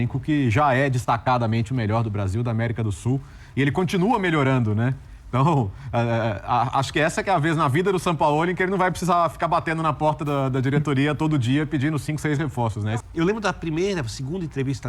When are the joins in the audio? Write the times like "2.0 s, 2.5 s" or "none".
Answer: 12.9 s